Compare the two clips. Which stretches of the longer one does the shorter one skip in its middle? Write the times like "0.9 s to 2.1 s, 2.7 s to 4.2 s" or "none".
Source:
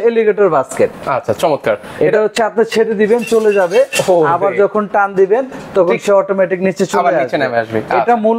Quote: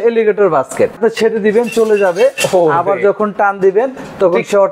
1.0 s to 2.5 s